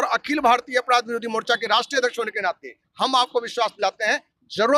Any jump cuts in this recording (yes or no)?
no